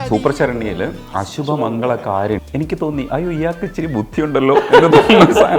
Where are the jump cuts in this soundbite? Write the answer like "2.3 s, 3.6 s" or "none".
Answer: 1.0 s, 2.4 s